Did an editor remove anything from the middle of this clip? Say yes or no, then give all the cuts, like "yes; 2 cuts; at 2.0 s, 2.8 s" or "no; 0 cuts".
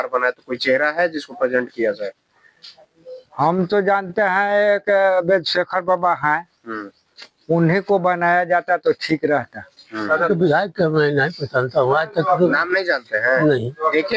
yes; 1 cut; at 10.3 s